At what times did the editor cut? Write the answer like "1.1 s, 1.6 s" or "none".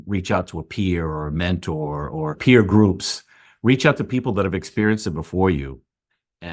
2.4 s